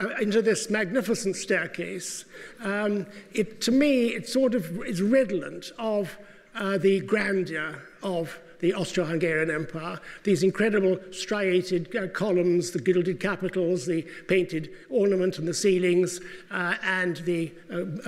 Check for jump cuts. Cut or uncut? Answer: uncut